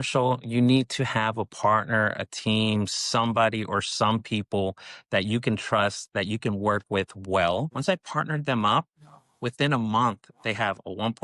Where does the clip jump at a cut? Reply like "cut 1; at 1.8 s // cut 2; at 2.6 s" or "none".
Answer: cut 1; at 7.7 s